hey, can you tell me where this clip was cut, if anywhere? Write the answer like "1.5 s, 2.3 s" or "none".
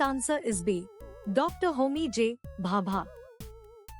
3.1 s